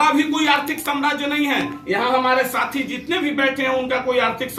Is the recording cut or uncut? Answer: uncut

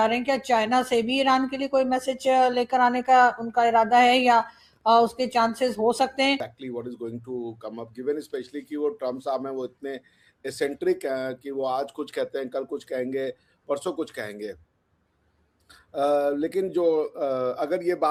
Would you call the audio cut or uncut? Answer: uncut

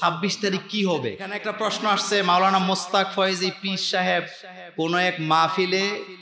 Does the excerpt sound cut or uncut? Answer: cut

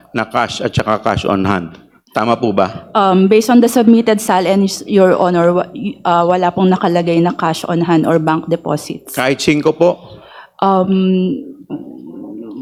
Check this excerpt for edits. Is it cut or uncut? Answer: uncut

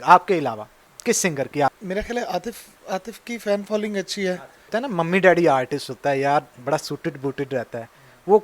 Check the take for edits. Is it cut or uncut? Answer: cut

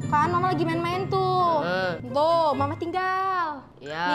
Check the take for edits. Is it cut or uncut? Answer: cut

